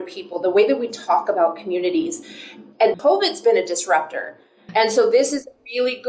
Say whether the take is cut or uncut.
cut